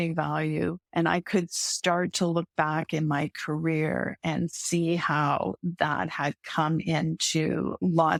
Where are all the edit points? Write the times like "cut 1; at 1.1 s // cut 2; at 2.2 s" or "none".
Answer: none